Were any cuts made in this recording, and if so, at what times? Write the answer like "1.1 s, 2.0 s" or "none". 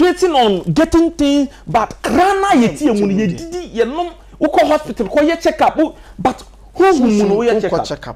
none